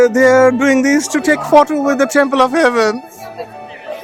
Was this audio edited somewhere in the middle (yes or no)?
no